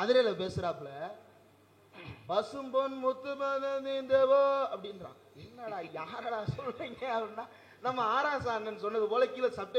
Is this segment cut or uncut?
uncut